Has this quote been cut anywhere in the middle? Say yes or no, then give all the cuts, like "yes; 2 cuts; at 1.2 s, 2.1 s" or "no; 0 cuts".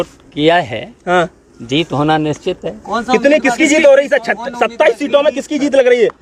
no; 0 cuts